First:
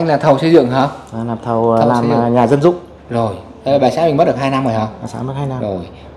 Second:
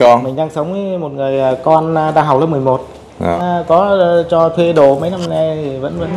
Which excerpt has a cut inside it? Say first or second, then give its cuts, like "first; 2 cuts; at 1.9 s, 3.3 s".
second; 1 cut; at 3.4 s